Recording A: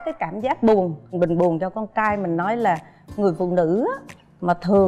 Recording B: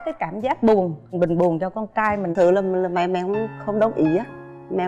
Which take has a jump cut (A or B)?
B